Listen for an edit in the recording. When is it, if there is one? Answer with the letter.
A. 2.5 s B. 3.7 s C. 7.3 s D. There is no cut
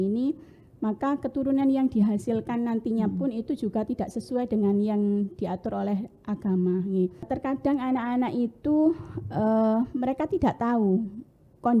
C